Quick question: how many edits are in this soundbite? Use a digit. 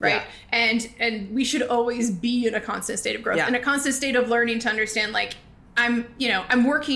0